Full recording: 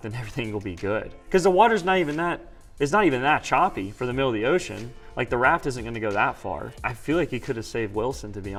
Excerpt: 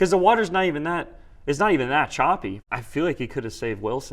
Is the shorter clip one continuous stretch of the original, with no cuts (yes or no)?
no